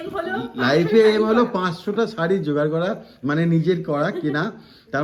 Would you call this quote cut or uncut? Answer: uncut